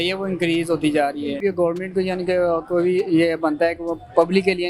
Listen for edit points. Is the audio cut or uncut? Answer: cut